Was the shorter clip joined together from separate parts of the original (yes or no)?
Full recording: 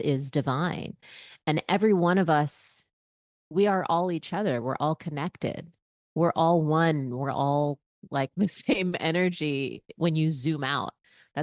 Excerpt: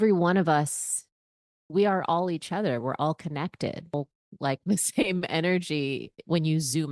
yes